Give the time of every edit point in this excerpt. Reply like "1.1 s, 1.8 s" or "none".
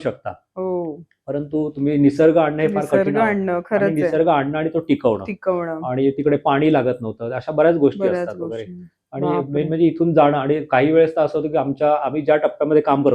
none